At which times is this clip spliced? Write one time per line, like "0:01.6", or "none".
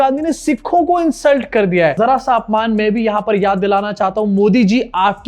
0:02.0